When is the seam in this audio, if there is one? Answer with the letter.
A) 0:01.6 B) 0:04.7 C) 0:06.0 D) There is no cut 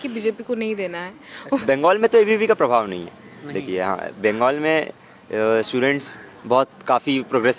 A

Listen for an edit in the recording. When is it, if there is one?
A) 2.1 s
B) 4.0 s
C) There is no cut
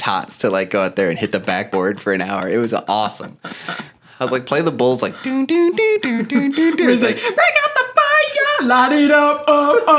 C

